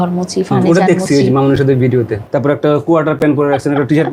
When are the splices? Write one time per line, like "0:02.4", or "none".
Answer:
0:02.2